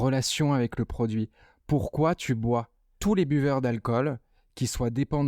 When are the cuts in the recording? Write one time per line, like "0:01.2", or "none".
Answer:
0:02.8